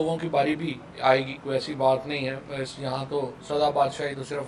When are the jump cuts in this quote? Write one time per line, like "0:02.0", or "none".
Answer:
none